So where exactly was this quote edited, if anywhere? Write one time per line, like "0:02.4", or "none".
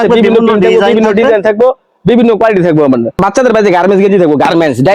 0:03.2